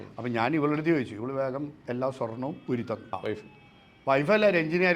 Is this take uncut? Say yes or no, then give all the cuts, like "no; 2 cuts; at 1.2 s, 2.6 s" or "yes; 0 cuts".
no; 1 cut; at 3.0 s